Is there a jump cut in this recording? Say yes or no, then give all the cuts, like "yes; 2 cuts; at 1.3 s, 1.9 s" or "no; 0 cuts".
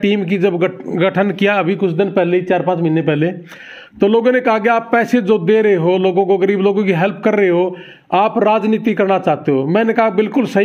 no; 0 cuts